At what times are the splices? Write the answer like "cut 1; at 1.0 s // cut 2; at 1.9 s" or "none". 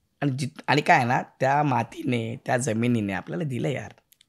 none